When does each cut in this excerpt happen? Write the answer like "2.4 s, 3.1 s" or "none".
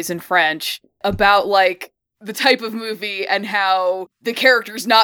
1.0 s, 4.1 s